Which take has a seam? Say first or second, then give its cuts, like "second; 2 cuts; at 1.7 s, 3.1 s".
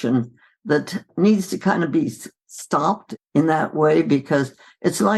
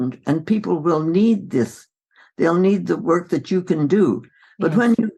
first; 2 cuts; at 1.1 s, 3.1 s